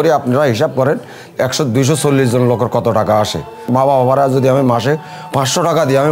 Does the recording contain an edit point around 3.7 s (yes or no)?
yes